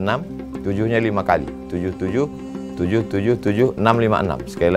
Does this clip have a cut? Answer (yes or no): no